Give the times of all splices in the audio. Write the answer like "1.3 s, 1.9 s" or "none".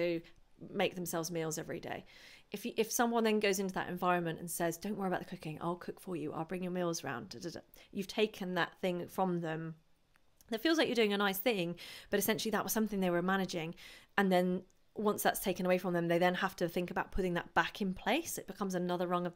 none

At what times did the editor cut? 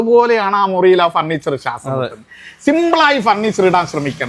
none

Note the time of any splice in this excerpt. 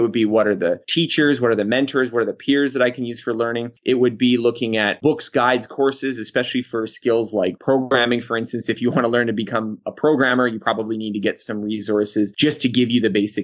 3.7 s, 5.0 s, 12.3 s

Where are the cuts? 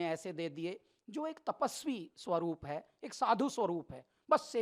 none

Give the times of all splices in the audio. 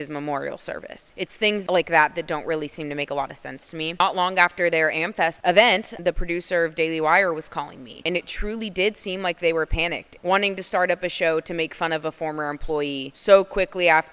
1.6 s, 3.9 s, 5.4 s, 5.9 s, 10.1 s, 13.1 s

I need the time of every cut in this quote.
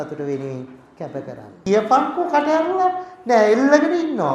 1.5 s

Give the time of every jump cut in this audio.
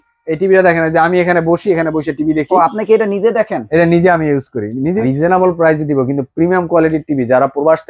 5.0 s

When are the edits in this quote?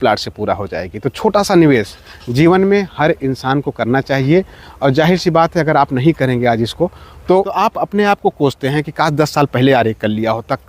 7.6 s

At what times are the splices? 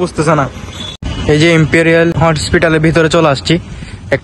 0.9 s, 2.2 s

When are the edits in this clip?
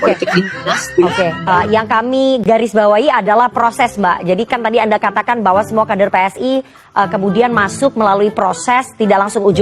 none

